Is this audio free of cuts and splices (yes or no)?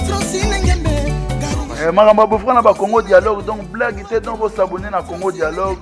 no